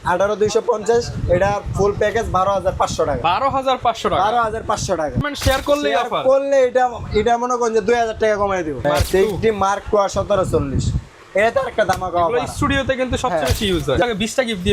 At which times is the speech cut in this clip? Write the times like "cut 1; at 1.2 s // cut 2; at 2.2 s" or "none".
cut 1; at 5.3 s // cut 2; at 8.8 s // cut 3; at 14.0 s